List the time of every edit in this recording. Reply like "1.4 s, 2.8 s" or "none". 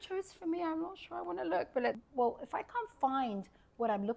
2.0 s